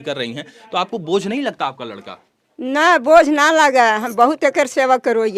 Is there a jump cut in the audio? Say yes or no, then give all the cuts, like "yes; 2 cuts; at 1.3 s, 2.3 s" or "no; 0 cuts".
no; 0 cuts